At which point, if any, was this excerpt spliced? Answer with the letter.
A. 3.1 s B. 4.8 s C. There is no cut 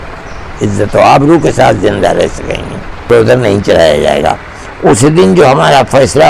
A